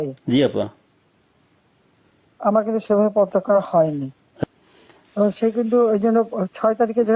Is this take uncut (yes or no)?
no